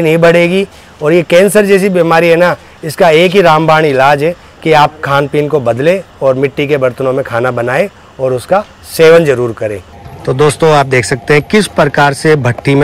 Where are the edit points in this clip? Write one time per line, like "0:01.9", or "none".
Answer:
none